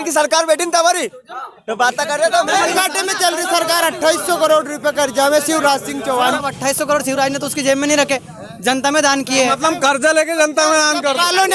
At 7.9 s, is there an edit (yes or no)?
no